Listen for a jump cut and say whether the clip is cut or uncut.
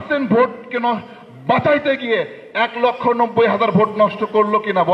uncut